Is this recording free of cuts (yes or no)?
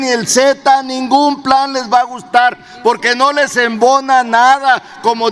yes